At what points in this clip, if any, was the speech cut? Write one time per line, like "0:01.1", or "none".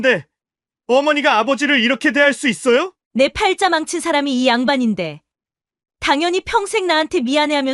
0:03.0